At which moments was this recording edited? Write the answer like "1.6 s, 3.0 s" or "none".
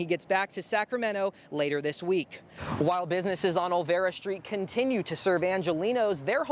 2.6 s

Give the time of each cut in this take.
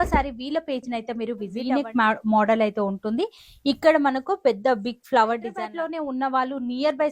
1.6 s, 5.5 s

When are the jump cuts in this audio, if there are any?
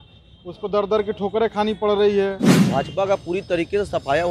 2.5 s

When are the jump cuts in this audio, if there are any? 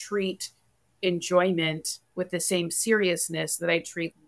none

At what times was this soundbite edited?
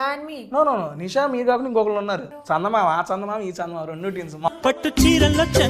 2.3 s, 4.5 s

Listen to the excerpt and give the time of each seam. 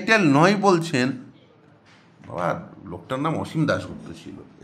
none

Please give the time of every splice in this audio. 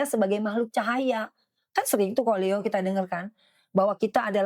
none

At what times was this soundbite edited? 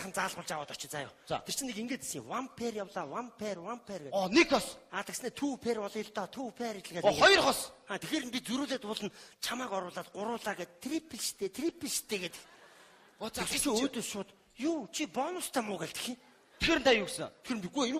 14.3 s

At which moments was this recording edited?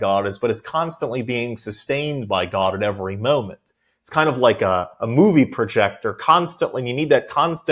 none

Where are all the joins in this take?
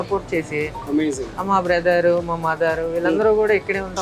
none

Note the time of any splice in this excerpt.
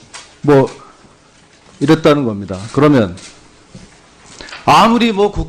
none

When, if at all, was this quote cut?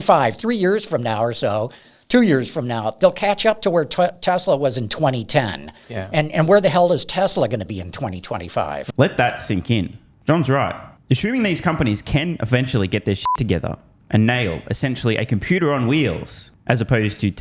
none

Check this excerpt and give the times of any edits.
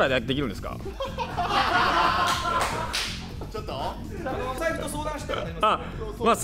none

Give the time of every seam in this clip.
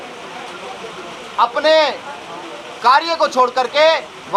none

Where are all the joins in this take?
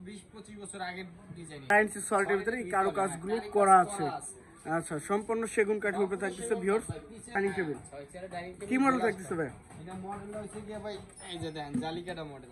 1.7 s, 7.3 s

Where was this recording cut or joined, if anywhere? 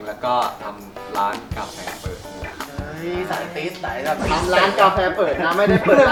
none

